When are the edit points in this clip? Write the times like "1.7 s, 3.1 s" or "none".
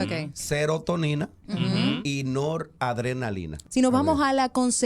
3.5 s